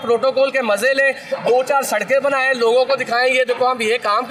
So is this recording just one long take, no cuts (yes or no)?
yes